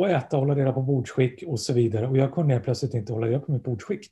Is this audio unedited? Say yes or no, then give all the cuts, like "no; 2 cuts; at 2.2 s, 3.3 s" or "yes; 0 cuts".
yes; 0 cuts